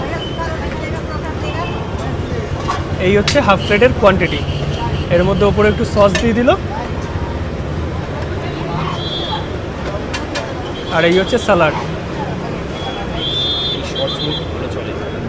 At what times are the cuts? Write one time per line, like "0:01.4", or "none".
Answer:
none

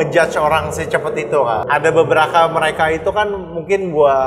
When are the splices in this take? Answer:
0:01.6

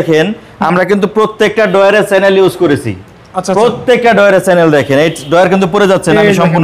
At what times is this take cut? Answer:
none

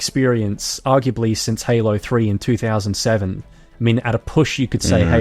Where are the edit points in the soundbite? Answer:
none

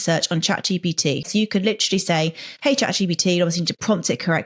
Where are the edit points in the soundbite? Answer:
0:01.3

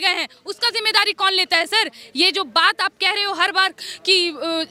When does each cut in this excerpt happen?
none

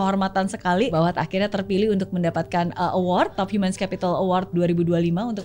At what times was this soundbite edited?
0:00.9
0:03.4
0:04.5

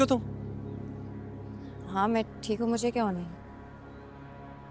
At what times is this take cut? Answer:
none

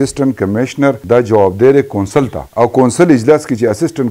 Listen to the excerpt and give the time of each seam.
0:01.0
0:02.4

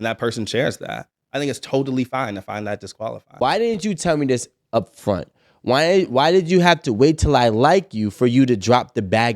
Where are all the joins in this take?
0:03.4

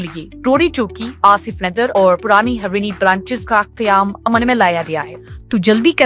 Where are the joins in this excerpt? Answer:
0:05.1

